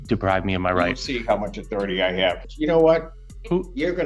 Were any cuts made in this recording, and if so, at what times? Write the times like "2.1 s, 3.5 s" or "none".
2.4 s